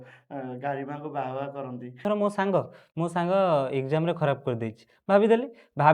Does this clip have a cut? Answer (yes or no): yes